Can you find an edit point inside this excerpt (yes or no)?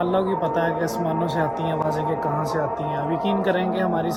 no